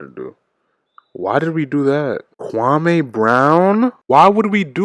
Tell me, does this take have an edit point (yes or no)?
yes